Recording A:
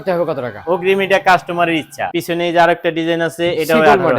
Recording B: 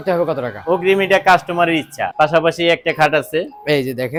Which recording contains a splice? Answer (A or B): A